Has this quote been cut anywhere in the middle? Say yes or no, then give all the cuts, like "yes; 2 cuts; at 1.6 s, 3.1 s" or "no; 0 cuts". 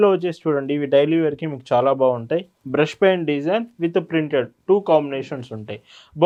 no; 0 cuts